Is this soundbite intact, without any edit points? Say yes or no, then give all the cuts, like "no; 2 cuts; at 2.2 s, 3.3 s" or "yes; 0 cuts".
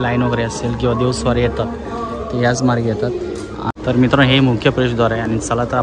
no; 1 cut; at 3.7 s